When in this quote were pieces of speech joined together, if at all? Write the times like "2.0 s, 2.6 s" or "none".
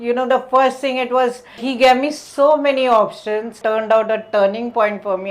1.6 s, 3.6 s